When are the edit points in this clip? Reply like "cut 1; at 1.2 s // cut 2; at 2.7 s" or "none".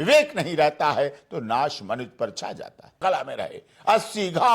cut 1; at 3.0 s